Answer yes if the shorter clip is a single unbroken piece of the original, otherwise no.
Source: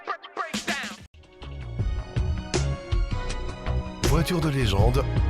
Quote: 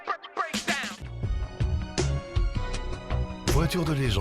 no